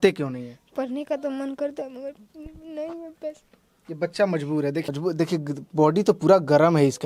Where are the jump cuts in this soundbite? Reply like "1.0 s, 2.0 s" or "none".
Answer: 4.8 s